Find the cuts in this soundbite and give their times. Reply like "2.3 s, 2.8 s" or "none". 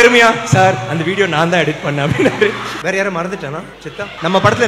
2.8 s